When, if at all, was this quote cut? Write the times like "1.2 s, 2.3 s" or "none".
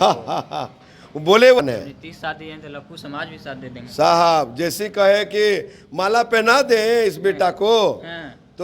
1.6 s